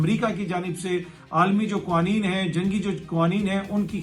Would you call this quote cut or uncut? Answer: uncut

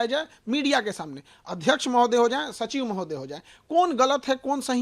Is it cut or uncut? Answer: uncut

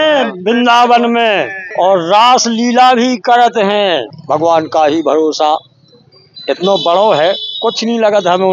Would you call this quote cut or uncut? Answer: cut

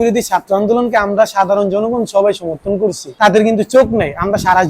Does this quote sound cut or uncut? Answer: cut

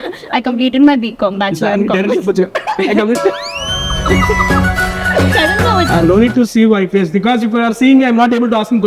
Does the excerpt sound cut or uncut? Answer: cut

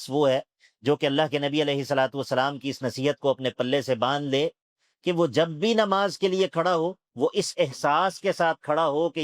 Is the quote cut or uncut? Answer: cut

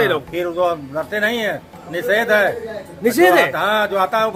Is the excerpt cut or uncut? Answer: uncut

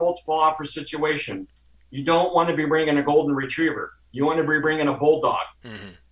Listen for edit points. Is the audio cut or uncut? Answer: uncut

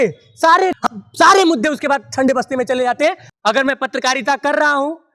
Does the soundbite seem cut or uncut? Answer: cut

